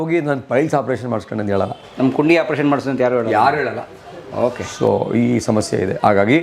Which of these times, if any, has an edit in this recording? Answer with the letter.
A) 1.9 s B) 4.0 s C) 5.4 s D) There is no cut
D